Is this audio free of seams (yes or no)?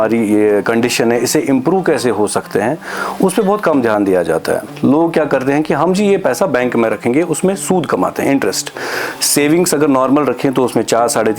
no